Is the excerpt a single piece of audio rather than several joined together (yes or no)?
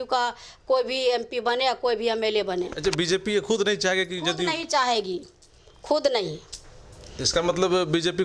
yes